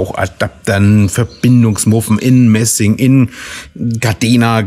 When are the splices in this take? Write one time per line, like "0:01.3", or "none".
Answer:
none